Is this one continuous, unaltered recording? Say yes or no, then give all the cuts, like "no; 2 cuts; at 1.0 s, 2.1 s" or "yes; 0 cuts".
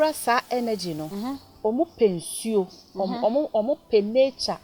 yes; 0 cuts